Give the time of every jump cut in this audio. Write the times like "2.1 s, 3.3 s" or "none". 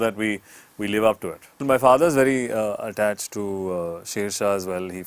1.6 s

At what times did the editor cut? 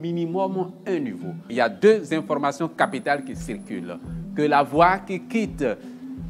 1.5 s

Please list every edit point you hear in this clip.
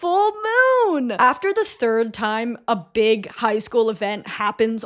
1.1 s

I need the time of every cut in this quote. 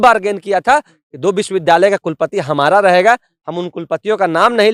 none

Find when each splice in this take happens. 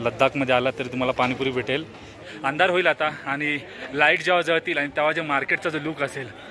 2.2 s

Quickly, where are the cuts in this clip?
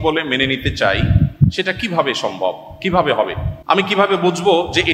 3.5 s

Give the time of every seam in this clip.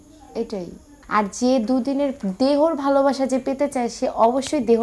0.9 s

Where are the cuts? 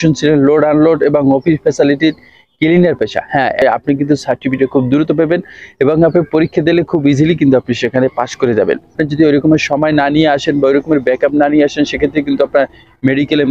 3.6 s, 8.9 s

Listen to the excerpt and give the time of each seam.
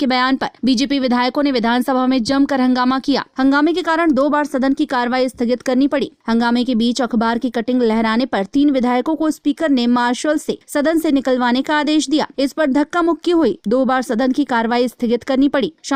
none

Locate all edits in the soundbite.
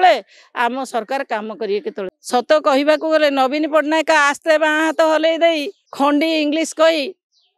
2.1 s, 5.8 s

